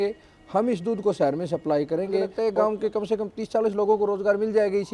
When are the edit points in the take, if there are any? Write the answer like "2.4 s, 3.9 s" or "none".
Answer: 2.3 s